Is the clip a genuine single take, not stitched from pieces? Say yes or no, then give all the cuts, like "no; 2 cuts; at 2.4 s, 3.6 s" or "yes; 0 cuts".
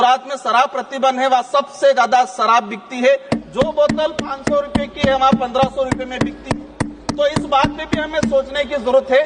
yes; 0 cuts